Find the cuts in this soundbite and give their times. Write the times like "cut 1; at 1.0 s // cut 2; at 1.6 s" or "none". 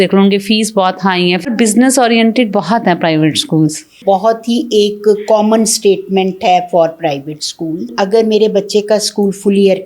cut 1; at 1.5 s // cut 2; at 3.9 s // cut 3; at 7.9 s